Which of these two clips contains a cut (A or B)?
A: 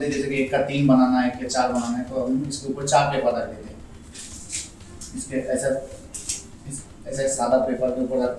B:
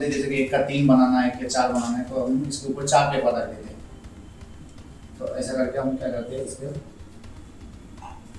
A